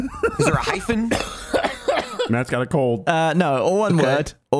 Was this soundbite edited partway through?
yes; 1 cut; at 3.0 s

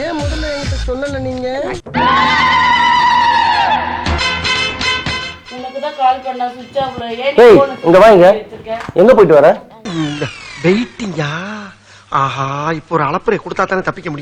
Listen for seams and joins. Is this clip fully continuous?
no; 1 cut; at 1.8 s

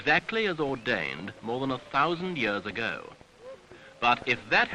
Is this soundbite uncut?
yes; 0 cuts

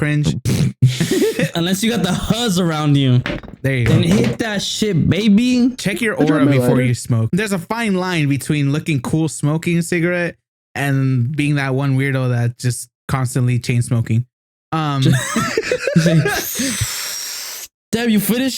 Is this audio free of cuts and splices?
no; 2 cuts; at 1.5 s, 7.3 s

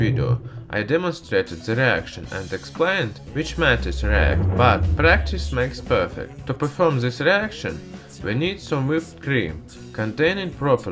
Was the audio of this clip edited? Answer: yes; 1 cut; at 6.2 s

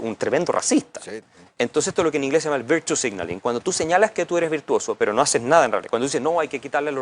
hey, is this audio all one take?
no; 1 cut; at 1.0 s

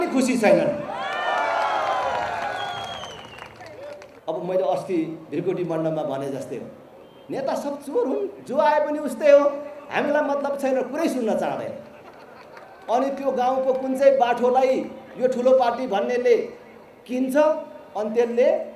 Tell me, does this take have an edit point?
yes; 1 cut; at 4.1 s

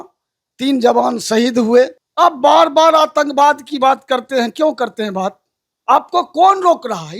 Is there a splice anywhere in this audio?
yes; 1 cut; at 2.0 s

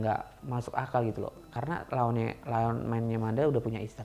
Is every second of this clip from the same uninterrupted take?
yes; 0 cuts

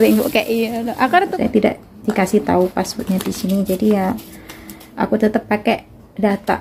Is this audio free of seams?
no; 1 cut; at 1.3 s

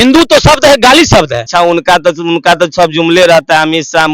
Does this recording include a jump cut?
yes; 1 cut; at 1.4 s

